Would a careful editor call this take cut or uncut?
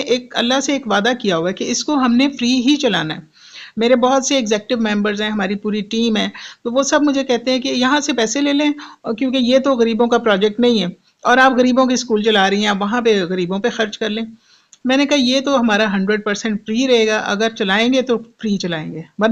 uncut